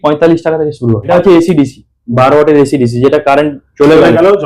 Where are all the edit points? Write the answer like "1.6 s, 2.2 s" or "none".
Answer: 1.1 s